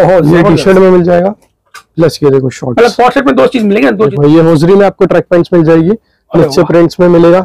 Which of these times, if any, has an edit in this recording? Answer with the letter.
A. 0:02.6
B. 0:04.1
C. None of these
B